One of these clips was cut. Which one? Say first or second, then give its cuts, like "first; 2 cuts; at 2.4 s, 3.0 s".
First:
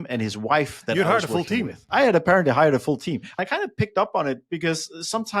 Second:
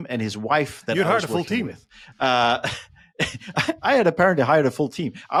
first; 2 cuts; at 1.8 s, 3.3 s